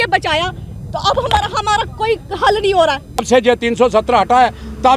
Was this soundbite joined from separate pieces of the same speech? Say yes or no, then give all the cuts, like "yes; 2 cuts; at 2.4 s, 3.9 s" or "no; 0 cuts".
yes; 1 cut; at 3.3 s